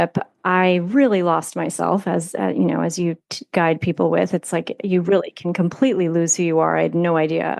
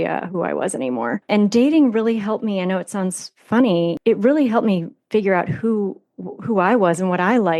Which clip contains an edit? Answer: second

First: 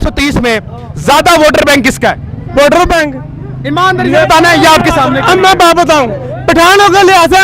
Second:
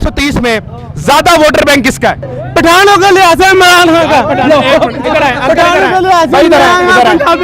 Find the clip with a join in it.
second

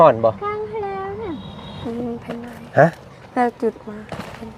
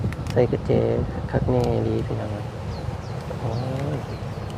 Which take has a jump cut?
first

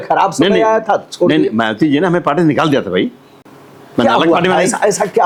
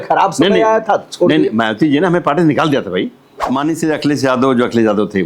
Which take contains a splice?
second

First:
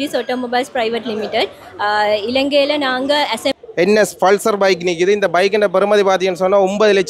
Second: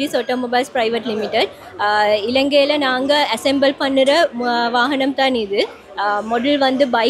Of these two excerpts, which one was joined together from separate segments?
first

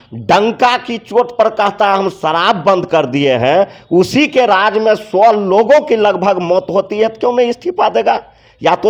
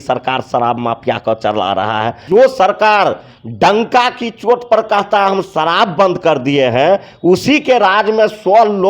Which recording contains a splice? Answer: second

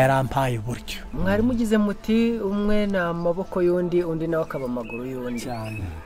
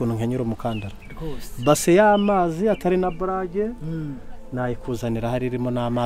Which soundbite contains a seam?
first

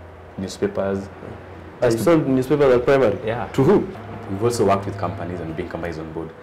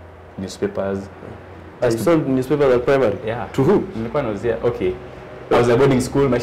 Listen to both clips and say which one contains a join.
first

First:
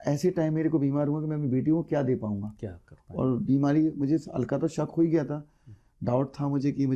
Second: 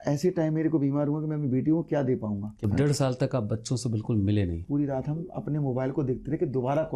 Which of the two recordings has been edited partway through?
second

